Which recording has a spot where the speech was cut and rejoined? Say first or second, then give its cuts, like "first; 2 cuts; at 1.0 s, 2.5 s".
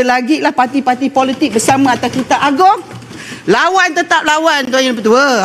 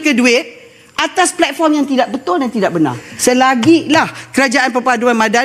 second; 1 cut; at 3.1 s